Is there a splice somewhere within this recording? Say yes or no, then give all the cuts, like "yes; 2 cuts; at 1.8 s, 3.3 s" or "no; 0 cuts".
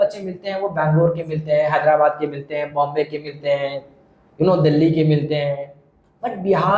no; 0 cuts